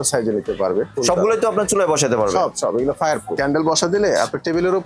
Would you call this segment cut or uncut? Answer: cut